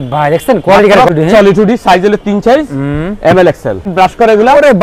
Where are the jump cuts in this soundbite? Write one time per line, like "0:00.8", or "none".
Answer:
0:01.1
0:03.9